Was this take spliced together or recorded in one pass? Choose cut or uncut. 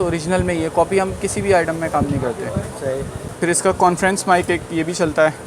cut